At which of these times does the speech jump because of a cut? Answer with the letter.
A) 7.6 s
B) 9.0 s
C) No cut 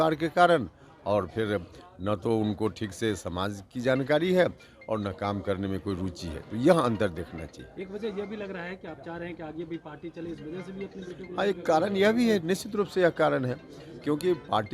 C